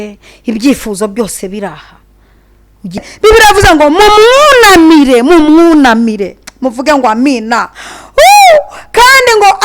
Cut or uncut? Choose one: cut